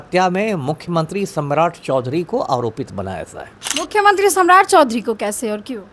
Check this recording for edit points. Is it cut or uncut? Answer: uncut